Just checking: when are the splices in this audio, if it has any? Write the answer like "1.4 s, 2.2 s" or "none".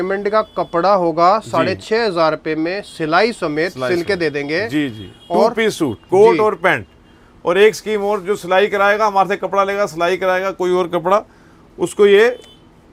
none